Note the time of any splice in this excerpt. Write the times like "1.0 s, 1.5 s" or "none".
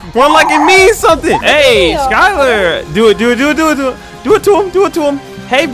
1.4 s

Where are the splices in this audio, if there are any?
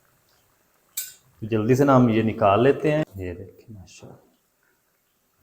3.2 s

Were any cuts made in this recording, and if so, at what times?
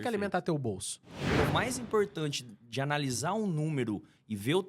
1.2 s

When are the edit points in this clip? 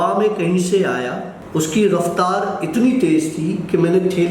1.3 s

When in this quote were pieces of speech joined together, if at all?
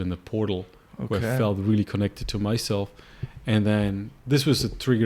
none

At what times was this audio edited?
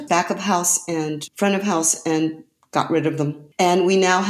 1.2 s, 3.4 s

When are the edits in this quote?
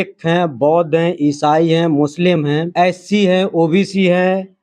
2.7 s

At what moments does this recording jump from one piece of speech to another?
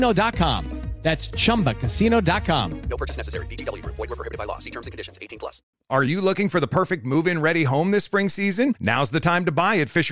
5.6 s

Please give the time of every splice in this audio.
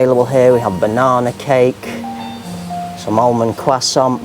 none

